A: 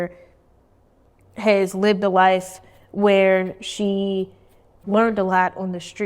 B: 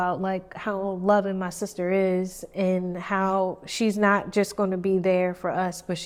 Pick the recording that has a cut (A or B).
A